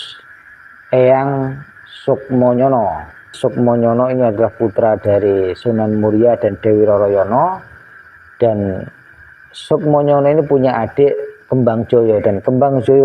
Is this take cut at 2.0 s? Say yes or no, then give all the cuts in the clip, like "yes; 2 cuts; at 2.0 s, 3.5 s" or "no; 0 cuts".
no; 1 cut; at 3.3 s